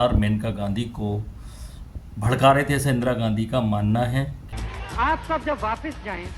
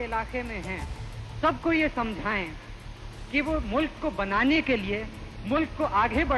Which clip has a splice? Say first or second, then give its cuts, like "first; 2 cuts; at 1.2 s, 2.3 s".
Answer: first; 1 cut; at 4.4 s